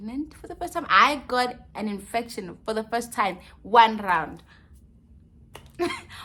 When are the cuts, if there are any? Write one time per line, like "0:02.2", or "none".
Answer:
none